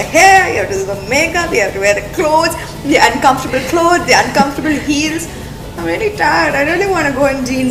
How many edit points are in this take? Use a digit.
0